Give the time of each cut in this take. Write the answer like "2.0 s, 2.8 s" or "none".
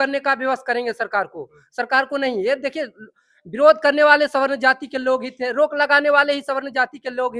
none